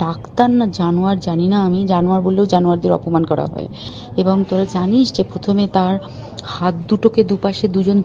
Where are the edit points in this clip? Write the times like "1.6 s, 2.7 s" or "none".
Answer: 3.9 s